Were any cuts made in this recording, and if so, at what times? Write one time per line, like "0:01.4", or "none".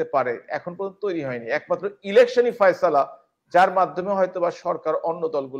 none

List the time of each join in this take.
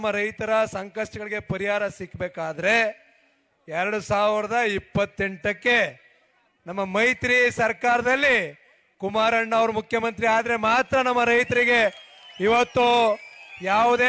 none

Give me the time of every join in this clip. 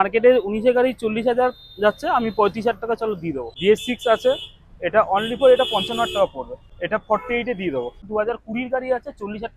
0:03.4
0:06.7
0:08.1

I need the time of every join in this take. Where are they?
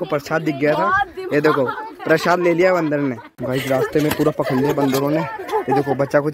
0:03.3

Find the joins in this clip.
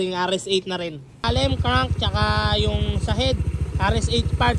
0:01.2

